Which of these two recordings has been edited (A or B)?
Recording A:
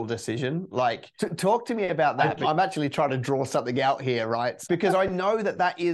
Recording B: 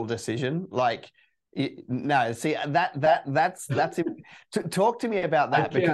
A